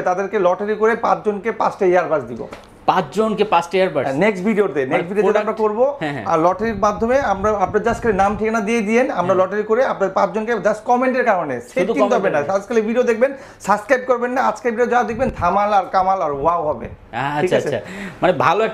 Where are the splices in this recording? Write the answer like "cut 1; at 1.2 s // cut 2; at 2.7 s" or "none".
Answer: none